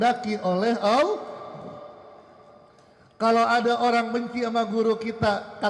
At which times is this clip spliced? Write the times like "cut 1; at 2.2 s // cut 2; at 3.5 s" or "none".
none